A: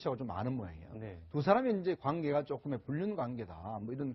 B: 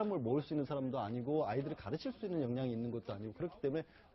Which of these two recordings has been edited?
B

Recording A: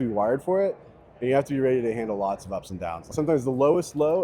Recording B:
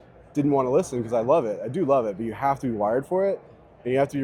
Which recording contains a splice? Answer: A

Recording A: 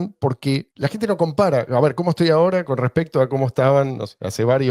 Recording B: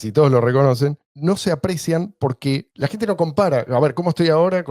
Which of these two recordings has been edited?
B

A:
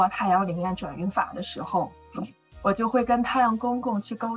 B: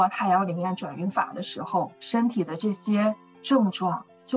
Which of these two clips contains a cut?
B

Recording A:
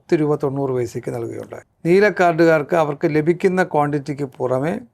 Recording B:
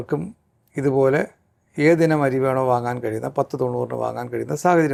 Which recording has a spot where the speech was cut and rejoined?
A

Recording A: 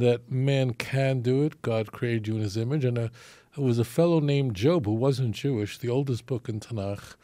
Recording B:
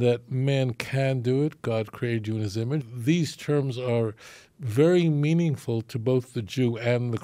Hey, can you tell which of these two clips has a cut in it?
B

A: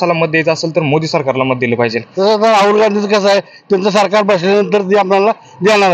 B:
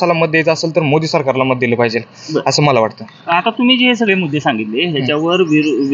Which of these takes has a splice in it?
A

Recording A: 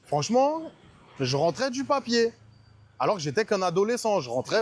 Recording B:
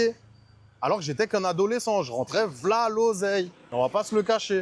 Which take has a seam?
B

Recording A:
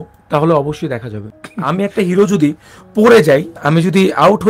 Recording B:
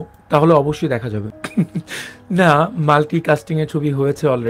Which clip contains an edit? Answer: A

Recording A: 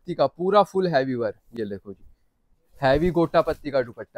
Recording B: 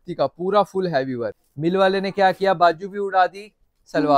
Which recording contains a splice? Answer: B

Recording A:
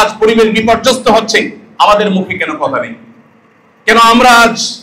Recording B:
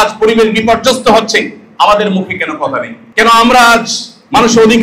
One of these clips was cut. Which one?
B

